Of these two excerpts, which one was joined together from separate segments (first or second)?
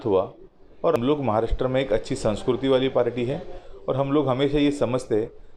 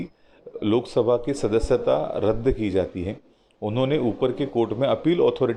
first